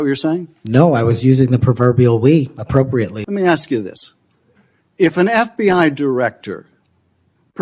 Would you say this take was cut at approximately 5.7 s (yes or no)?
no